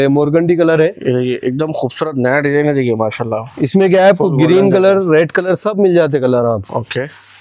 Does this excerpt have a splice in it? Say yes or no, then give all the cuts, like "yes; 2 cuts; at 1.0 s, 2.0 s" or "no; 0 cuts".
no; 0 cuts